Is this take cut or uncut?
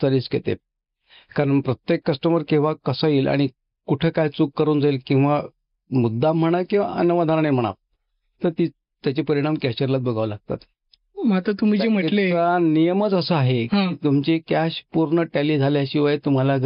uncut